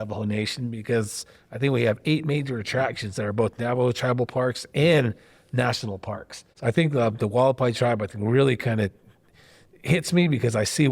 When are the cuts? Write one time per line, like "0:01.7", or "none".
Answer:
0:06.4